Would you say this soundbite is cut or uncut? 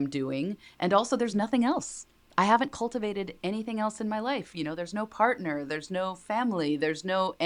uncut